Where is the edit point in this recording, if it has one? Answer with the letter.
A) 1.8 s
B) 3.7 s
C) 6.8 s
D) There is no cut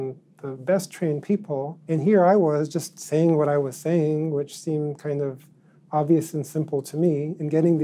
A